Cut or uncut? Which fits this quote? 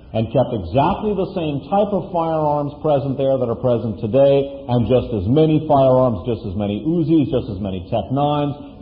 cut